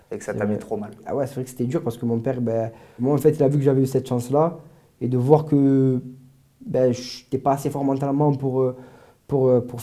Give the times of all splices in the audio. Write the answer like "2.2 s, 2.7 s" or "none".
1.0 s, 3.0 s